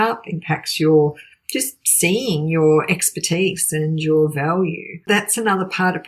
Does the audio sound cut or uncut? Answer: cut